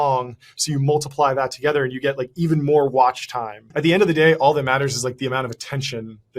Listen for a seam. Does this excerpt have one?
yes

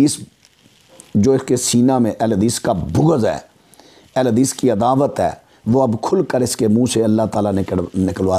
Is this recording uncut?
yes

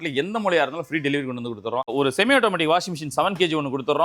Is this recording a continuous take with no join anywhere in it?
no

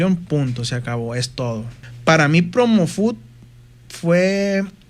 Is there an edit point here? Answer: yes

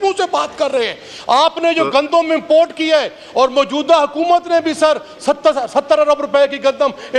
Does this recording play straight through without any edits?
yes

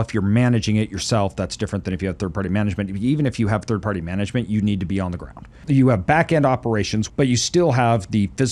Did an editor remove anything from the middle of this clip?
yes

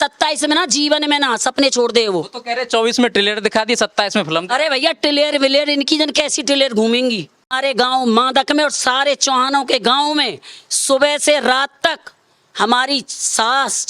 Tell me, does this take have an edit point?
yes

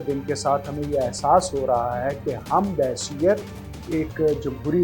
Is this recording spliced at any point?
no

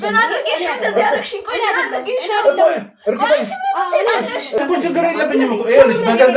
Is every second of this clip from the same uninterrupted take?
no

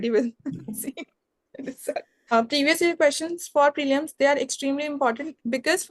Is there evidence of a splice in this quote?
yes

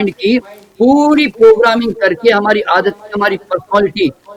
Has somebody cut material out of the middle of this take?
no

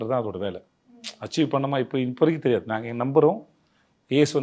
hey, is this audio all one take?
yes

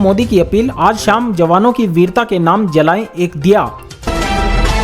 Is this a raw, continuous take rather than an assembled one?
no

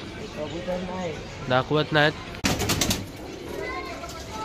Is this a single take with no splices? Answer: no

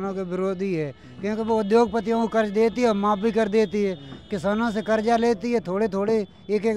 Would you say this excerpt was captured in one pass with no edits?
yes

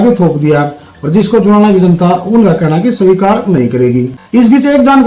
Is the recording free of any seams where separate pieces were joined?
no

